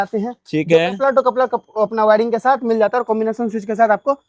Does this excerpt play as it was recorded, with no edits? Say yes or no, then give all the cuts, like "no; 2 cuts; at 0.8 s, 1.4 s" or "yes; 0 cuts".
yes; 0 cuts